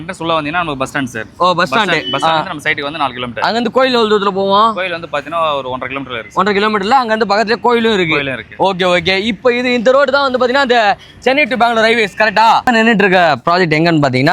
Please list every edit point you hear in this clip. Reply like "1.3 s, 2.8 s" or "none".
12.7 s